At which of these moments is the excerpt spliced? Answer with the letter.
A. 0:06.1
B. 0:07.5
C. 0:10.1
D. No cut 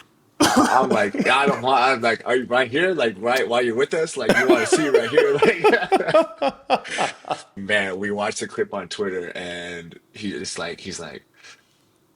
B